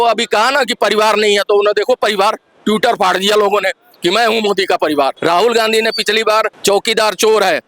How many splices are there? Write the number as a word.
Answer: two